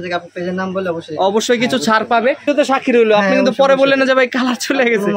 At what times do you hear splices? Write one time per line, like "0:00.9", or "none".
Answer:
0:02.5

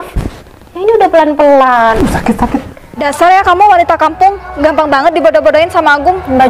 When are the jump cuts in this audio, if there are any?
0:03.0

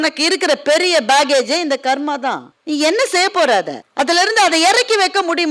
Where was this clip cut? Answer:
0:02.5
0:03.8

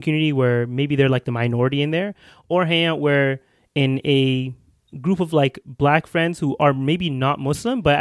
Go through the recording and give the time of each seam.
none

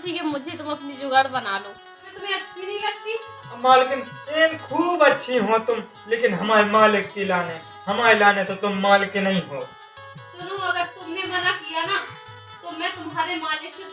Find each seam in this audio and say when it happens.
0:02.2

